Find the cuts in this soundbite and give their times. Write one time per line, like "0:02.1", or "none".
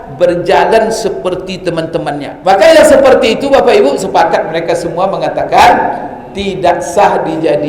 0:02.3